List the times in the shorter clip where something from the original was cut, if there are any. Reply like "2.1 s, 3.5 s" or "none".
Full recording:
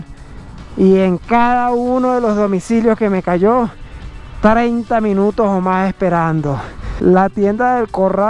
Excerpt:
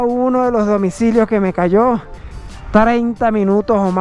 none